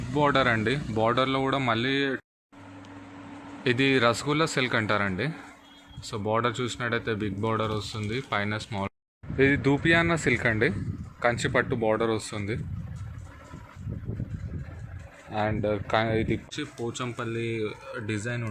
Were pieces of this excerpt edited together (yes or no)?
yes